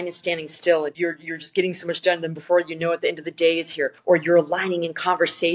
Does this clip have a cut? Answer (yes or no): yes